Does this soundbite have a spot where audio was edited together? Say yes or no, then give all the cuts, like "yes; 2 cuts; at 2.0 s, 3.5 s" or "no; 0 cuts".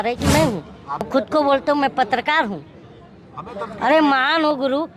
yes; 1 cut; at 1.1 s